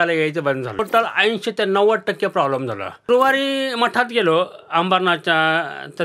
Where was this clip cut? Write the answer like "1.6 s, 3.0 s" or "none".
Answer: 0.8 s, 3.1 s